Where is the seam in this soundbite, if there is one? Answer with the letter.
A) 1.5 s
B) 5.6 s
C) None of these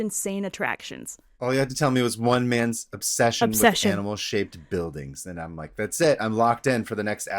A